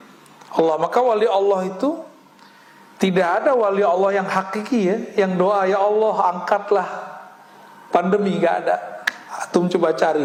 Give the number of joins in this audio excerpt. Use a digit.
0